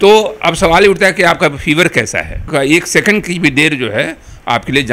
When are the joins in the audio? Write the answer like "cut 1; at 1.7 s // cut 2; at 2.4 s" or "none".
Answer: cut 1; at 2.4 s